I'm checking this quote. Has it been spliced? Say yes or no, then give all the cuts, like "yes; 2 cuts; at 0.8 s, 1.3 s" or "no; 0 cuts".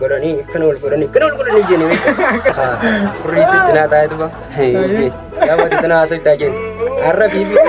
yes; 1 cut; at 2.5 s